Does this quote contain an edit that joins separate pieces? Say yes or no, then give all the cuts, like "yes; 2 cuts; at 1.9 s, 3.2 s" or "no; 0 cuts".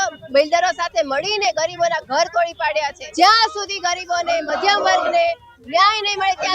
yes; 1 cut; at 3.1 s